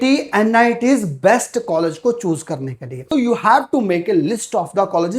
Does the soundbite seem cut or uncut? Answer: cut